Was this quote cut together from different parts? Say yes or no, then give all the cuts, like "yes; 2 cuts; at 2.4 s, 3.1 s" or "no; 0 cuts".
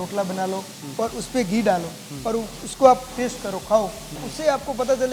yes; 1 cut; at 4.1 s